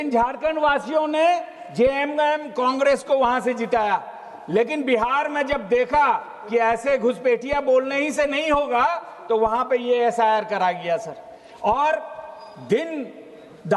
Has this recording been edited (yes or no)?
no